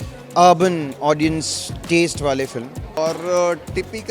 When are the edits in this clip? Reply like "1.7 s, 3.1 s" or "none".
3.0 s